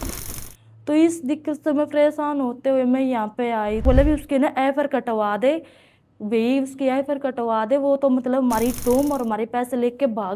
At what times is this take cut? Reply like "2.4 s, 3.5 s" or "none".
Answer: 3.8 s